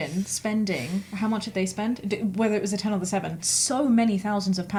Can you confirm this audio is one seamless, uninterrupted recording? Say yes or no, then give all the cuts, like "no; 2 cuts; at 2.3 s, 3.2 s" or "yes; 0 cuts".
yes; 0 cuts